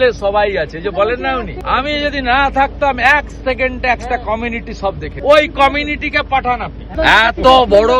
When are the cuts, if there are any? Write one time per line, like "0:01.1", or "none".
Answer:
0:01.5
0:05.1
0:06.9